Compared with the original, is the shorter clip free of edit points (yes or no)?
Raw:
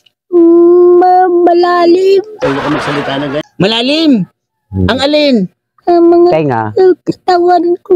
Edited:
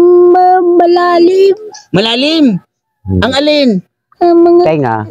no